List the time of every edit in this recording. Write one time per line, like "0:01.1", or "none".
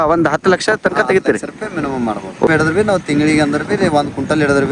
0:02.5